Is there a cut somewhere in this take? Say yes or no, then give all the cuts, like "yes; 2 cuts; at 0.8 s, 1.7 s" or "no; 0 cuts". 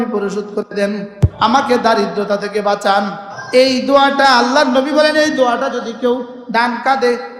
no; 0 cuts